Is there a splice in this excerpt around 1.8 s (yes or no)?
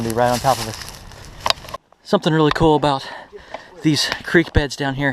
yes